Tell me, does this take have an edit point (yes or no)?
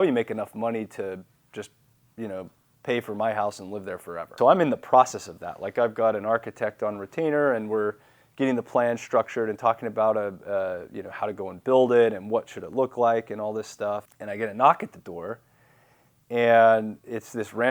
yes